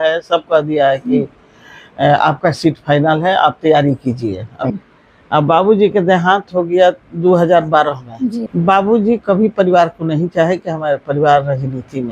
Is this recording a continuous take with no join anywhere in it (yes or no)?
no